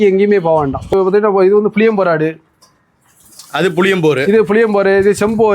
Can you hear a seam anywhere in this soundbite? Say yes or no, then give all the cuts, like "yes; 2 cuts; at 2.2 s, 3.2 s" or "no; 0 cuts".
yes; 1 cut; at 0.9 s